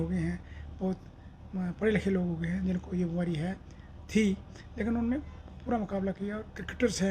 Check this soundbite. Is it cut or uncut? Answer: uncut